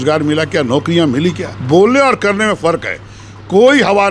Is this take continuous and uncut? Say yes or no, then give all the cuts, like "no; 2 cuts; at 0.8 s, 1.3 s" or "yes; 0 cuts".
no; 1 cut; at 1.5 s